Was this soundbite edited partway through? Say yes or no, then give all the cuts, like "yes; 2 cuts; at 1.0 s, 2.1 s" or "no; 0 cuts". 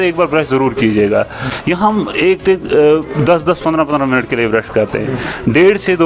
yes; 1 cut; at 1.5 s